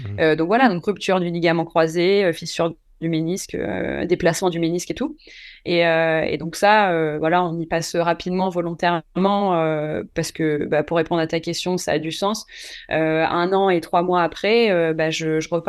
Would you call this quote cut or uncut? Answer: uncut